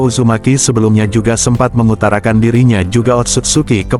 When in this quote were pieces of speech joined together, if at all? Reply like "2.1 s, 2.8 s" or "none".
none

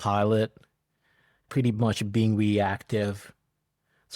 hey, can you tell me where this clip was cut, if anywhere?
1.5 s

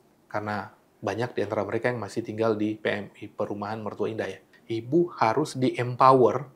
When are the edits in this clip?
4.4 s, 5.5 s

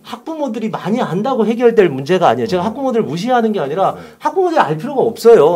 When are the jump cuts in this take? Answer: none

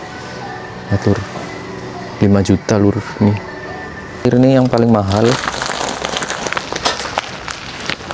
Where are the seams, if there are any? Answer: 4.2 s

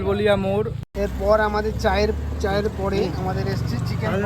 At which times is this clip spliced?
0.9 s

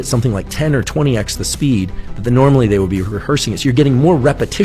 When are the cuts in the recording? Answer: none

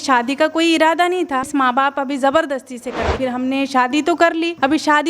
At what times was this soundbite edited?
1.5 s, 3.1 s

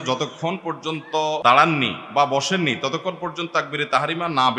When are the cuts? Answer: 1.4 s

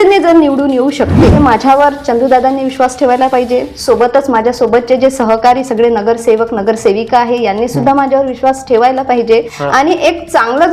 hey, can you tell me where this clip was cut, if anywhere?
1.3 s, 9.6 s

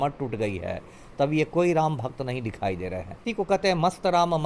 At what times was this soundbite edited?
3.3 s

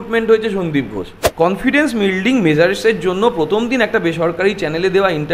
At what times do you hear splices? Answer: 1.2 s

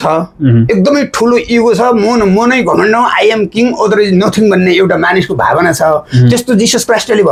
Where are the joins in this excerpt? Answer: none

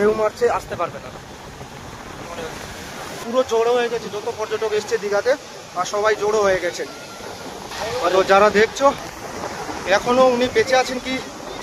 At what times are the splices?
3.2 s, 7.7 s

